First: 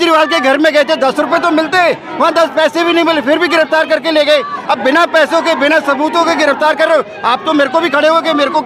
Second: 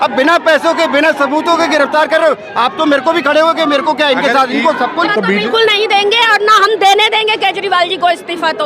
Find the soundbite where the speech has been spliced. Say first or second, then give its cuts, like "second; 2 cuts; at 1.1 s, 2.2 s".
second; 1 cut; at 5.1 s